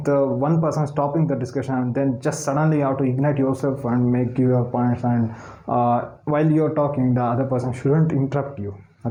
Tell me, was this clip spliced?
no; 0 cuts

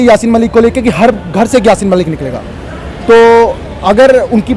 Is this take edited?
no; 0 cuts

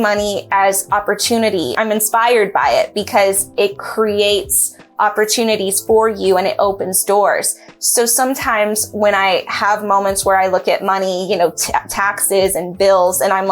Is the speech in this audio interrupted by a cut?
yes; 1 cut; at 1.7 s

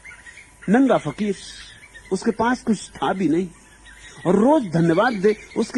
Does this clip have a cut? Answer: no; 0 cuts

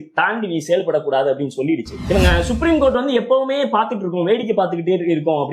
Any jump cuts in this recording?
yes; 1 cut; at 1.9 s

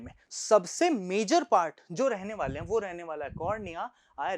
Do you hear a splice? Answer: no; 0 cuts

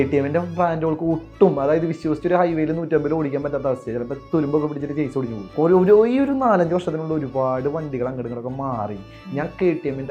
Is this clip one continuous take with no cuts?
no; 1 cut; at 5.4 s

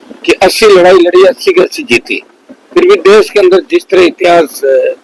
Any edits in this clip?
no; 0 cuts

